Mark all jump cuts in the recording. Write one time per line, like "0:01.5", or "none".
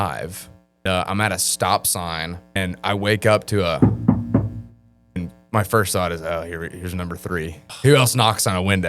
0:00.8
0:02.6
0:05.2
0:07.7